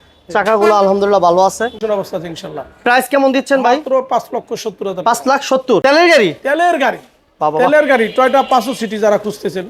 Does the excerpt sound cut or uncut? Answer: cut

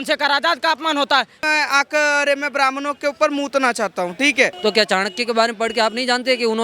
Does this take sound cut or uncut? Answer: cut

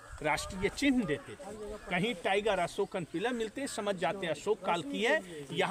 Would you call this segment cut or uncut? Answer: uncut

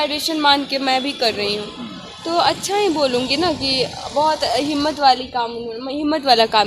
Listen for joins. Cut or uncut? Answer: uncut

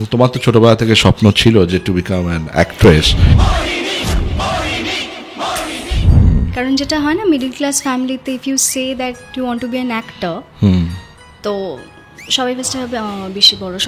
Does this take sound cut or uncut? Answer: cut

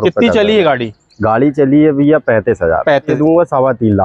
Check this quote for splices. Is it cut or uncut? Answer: cut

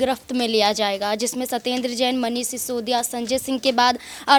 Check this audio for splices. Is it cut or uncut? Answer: uncut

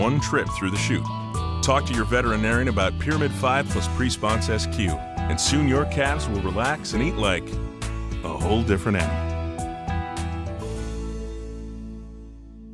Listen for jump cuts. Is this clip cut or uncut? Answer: uncut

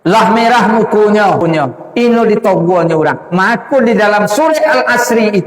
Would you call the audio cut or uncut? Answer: cut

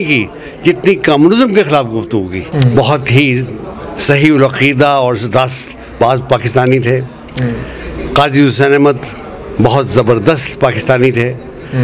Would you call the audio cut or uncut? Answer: cut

